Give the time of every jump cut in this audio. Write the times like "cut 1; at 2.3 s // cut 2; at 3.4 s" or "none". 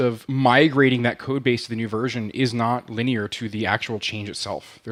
none